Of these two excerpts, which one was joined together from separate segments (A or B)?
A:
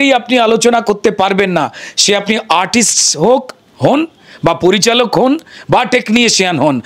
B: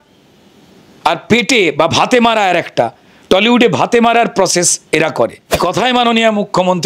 B